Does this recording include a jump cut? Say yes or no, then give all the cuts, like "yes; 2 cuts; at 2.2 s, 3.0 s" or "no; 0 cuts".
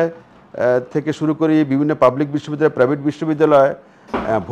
no; 0 cuts